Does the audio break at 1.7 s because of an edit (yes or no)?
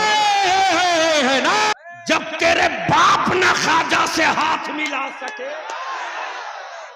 yes